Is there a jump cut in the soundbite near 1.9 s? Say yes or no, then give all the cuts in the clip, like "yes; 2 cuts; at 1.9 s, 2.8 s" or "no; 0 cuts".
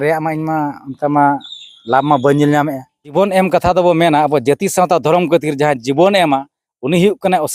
no; 1 cut; at 3.1 s